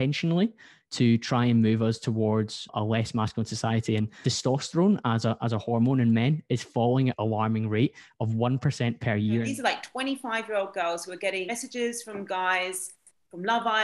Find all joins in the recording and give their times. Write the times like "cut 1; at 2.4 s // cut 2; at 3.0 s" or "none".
cut 1; at 2.7 s // cut 2; at 4.1 s // cut 3; at 7.1 s // cut 4; at 9.5 s // cut 5; at 11.5 s